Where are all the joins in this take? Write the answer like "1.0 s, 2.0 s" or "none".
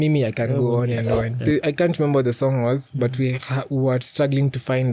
1.3 s